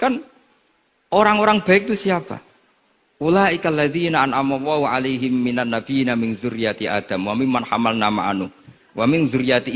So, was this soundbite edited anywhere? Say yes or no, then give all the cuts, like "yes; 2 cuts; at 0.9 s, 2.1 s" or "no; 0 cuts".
no; 0 cuts